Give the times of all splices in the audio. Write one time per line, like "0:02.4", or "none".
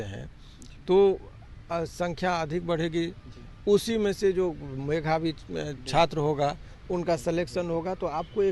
none